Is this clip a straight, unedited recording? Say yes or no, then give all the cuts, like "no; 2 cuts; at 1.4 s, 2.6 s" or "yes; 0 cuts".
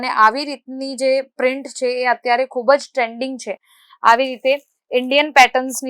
yes; 0 cuts